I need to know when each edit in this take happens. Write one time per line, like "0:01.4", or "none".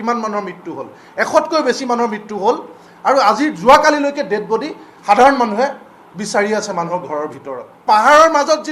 0:07.8